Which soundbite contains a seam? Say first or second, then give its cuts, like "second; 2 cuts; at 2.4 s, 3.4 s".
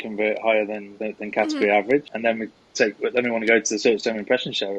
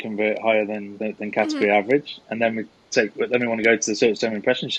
first; 1 cut; at 2.1 s